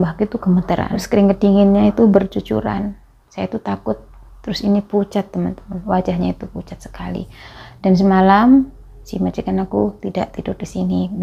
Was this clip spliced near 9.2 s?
no; 1 cut; at 1.0 s

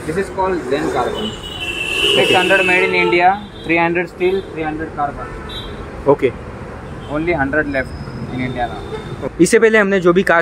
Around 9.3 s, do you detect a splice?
yes; 1 cut; at 9.3 s

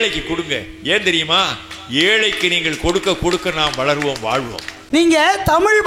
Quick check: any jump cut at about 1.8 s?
no; 1 cut; at 4.8 s

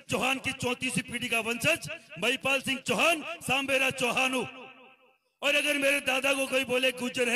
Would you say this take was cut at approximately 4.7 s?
no; 0 cuts

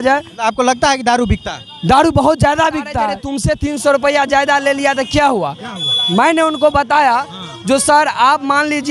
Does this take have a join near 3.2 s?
yes; 1 cut; at 3.2 s

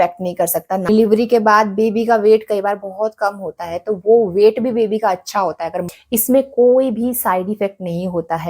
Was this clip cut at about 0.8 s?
yes; 2 cuts; at 0.8 s, 5.9 s

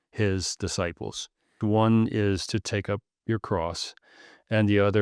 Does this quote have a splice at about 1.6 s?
yes; 1 cut; at 1.6 s

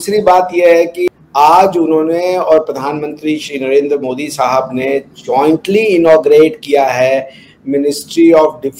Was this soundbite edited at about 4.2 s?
no; 1 cut; at 1.1 s

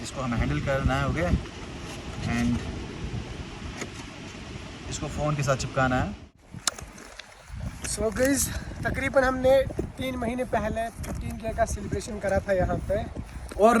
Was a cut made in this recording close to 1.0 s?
no; 1 cut; at 6.3 s

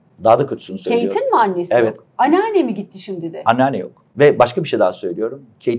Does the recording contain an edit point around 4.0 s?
yes; 1 cut; at 4.0 s

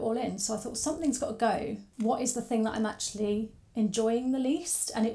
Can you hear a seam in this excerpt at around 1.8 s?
yes; 1 cut; at 1.8 s

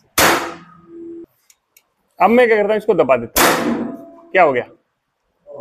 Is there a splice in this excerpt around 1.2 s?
yes; 1 cut; at 1.2 s

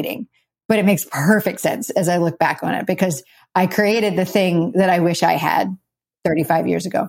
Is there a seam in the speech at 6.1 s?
yes; 1 cut; at 6.1 s

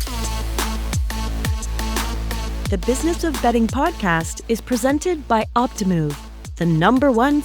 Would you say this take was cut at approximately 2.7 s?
yes; 1 cut; at 2.7 s

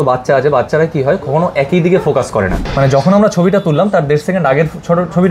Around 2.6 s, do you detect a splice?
yes; 1 cut; at 2.6 s

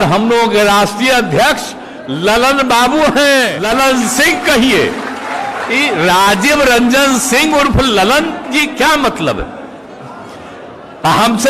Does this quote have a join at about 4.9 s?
no; 1 cut; at 3.6 s

